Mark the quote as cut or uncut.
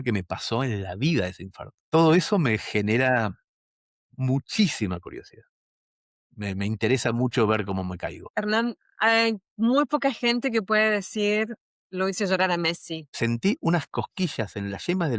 cut